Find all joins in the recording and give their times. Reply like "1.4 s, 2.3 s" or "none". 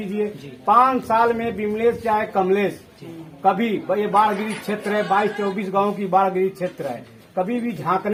none